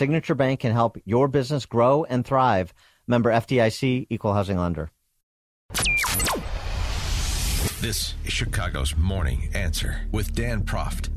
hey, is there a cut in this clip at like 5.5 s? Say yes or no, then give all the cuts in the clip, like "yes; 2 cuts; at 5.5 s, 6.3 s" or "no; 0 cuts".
yes; 1 cut; at 5.5 s